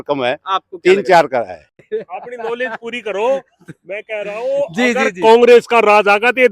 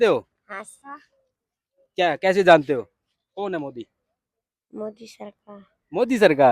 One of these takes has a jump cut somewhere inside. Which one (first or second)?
first